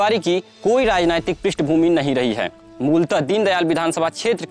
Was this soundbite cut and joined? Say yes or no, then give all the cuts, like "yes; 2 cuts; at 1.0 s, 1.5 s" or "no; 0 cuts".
no; 0 cuts